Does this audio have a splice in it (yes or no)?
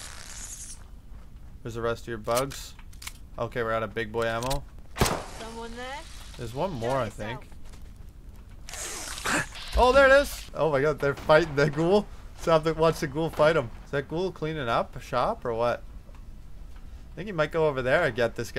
yes